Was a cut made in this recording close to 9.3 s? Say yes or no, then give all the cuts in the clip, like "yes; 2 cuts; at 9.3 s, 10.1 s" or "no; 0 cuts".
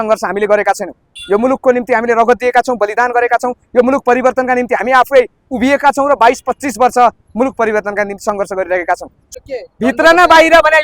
yes; 1 cut; at 9.3 s